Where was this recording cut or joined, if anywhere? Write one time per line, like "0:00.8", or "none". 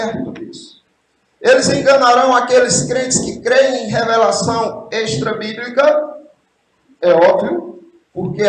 none